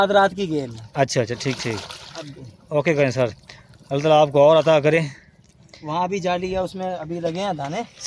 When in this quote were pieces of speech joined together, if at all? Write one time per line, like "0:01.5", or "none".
none